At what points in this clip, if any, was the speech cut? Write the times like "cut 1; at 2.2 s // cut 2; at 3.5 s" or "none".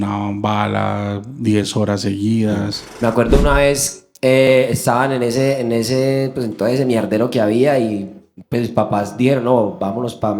cut 1; at 2.8 s

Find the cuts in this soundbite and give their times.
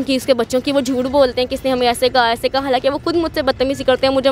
none

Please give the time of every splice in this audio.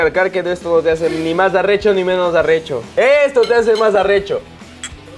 none

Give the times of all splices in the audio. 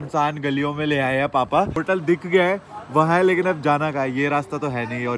cut 1; at 1.8 s

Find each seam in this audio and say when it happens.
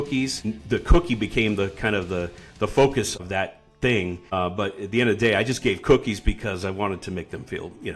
cut 1; at 3.1 s

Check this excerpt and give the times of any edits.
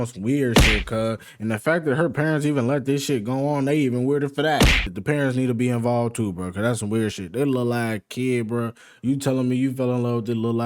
cut 1; at 4.9 s

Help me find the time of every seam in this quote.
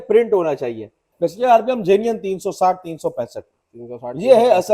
cut 1; at 1.0 s

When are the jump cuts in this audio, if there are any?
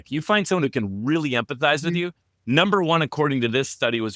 none

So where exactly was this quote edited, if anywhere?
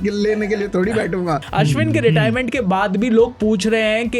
cut 1; at 1.4 s

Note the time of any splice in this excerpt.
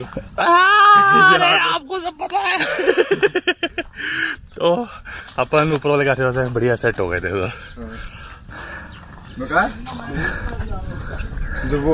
none

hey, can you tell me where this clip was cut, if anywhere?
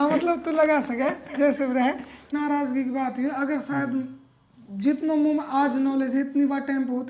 cut 1; at 2.3 s

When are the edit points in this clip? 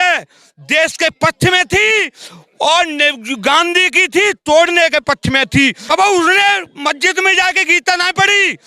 cut 1; at 5.8 s

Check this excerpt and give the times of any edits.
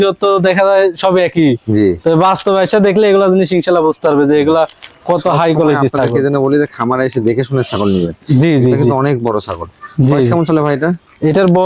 none

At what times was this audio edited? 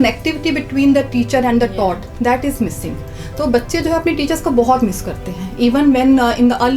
none

